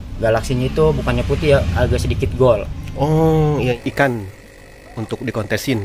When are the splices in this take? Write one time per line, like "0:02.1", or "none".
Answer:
0:03.8